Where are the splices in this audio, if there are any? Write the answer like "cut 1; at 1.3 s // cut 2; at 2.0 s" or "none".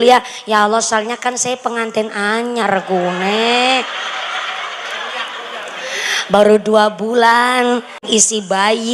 cut 1; at 8.0 s